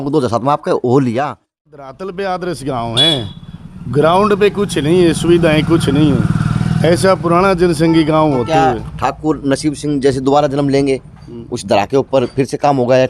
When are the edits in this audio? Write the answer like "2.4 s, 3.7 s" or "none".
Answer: 1.7 s